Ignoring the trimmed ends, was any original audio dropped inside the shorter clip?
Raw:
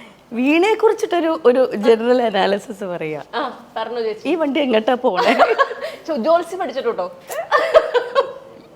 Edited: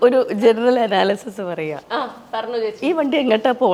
no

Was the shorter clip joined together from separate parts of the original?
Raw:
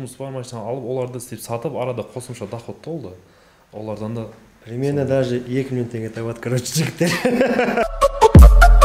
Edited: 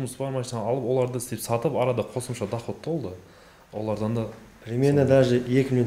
no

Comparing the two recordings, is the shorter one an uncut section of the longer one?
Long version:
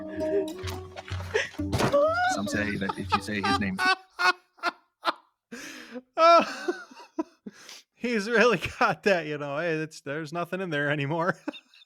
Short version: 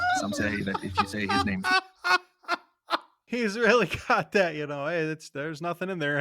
no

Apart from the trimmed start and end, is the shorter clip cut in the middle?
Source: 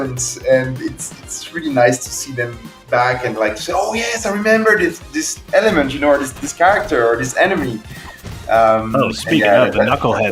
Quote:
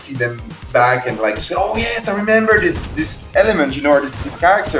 no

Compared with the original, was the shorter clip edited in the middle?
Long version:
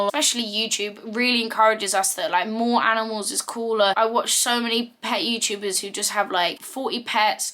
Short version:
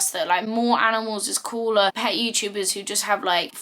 yes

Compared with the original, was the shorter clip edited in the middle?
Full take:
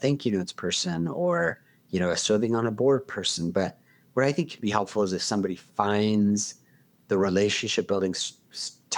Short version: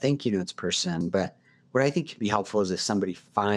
yes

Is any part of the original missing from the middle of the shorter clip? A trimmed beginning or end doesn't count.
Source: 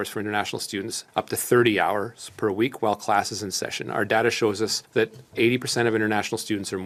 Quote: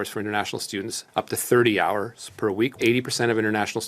yes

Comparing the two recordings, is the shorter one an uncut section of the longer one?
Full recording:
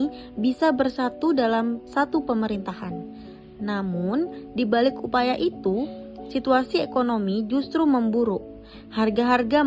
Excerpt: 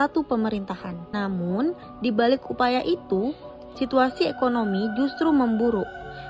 no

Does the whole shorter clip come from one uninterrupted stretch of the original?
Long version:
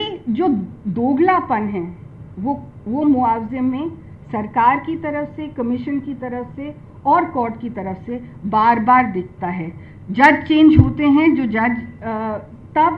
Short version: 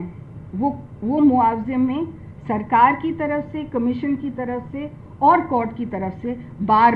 yes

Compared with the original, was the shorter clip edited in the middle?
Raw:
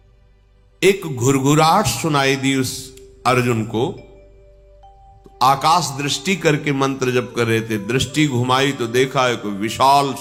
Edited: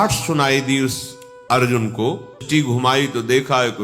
yes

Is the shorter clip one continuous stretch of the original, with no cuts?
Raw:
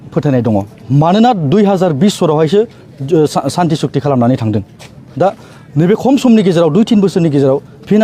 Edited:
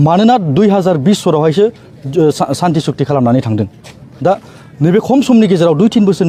yes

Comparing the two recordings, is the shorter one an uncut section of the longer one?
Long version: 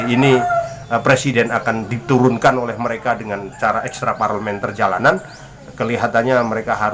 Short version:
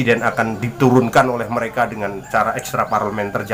yes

